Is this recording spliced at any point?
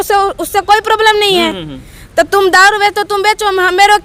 no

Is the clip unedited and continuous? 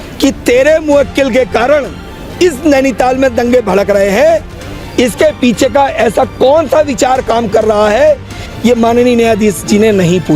no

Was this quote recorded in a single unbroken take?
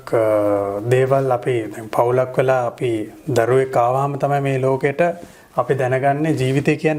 yes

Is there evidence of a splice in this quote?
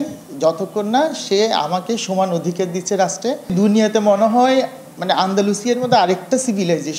yes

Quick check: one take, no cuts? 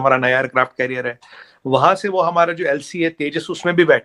yes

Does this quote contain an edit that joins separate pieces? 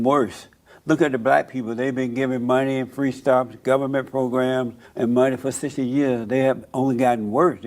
yes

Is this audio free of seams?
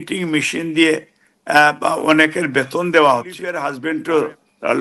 no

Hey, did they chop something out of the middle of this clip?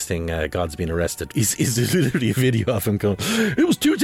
yes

